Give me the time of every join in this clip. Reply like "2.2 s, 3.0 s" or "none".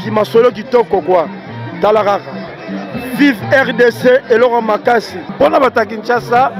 5.3 s